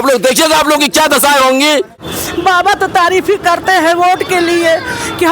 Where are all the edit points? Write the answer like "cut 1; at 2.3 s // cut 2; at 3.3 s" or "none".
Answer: cut 1; at 2.0 s